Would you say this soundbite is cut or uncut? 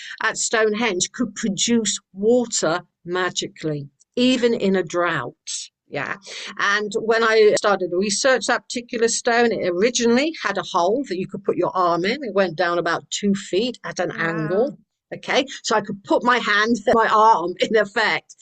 cut